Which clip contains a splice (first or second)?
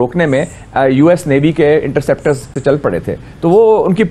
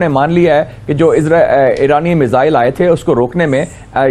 first